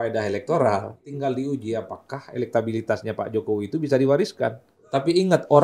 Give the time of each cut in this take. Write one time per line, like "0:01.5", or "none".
0:01.1
0:04.8